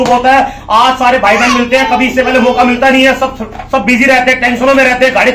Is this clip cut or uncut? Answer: uncut